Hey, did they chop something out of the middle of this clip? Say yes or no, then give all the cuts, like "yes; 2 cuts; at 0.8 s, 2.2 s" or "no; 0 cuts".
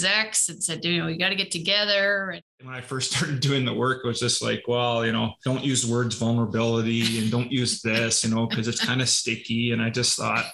yes; 2 cuts; at 2.8 s, 5.4 s